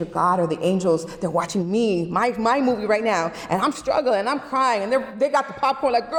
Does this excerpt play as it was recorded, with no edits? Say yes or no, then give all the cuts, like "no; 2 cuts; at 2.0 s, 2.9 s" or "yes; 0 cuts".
yes; 0 cuts